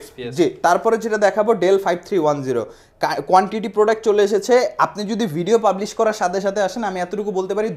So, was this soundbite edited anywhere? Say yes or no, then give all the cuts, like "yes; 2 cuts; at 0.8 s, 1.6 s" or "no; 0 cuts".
no; 0 cuts